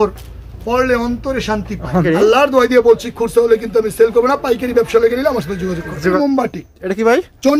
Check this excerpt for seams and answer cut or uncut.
cut